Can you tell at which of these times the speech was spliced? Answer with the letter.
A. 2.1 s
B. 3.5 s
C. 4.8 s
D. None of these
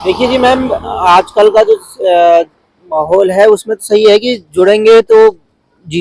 D